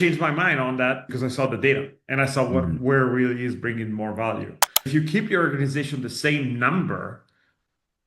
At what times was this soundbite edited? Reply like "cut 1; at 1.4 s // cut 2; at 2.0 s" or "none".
cut 1; at 1.0 s // cut 2; at 4.9 s

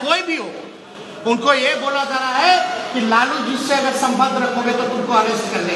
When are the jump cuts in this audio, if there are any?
none

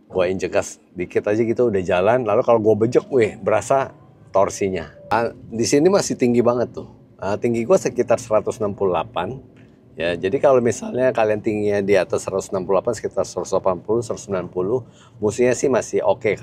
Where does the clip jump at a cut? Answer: cut 1; at 5.0 s

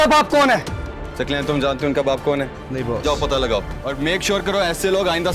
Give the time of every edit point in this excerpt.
cut 1; at 2.6 s // cut 2; at 3.8 s

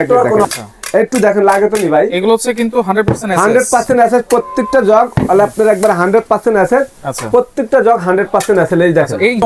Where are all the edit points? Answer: none

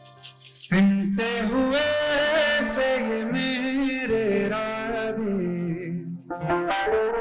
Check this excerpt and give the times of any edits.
none

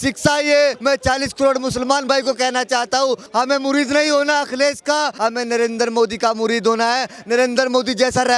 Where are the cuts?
cut 1; at 0.8 s // cut 2; at 3.2 s // cut 3; at 5.1 s

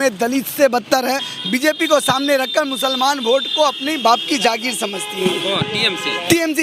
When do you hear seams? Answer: cut 1; at 1.2 s

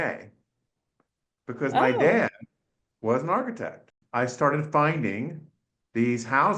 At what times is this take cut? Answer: cut 1; at 3.9 s

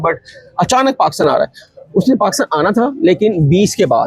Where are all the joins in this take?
none

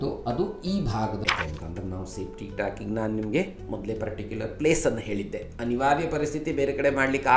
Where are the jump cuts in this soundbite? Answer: cut 1; at 1.2 s

